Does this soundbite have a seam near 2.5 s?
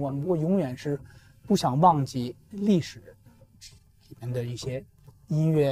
yes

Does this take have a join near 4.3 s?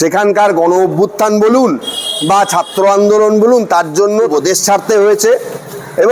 yes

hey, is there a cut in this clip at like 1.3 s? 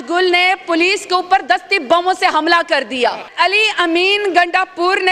no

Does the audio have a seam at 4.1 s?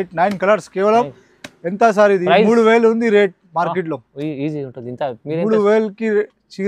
no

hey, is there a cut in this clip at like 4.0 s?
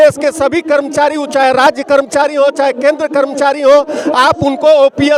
no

